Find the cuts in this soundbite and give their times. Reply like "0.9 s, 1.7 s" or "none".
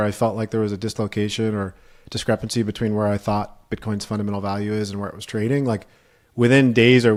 none